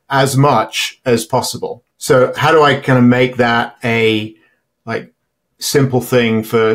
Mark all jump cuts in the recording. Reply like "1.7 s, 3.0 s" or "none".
1.9 s